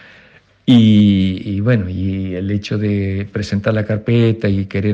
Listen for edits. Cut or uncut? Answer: uncut